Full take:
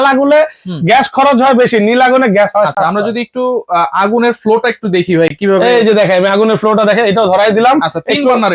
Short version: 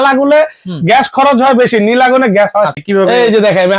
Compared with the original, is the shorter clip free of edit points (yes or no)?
no